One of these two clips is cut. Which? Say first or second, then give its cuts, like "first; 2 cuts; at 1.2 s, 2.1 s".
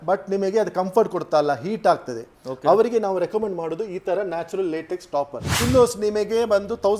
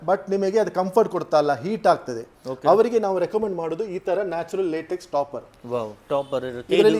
first; 1 cut; at 5.5 s